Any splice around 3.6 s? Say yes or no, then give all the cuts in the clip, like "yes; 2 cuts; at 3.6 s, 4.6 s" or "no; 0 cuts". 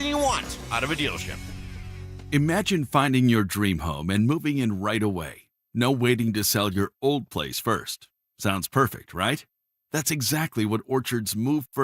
no; 1 cut; at 1.8 s